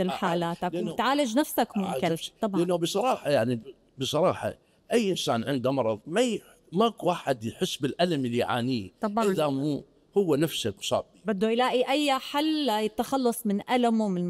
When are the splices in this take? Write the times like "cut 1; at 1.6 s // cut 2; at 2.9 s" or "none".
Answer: none